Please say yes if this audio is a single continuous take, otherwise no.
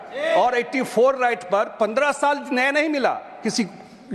yes